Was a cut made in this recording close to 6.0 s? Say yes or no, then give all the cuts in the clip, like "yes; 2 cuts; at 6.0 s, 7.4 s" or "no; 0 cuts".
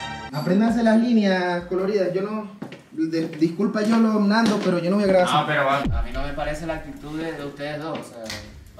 yes; 1 cut; at 6.0 s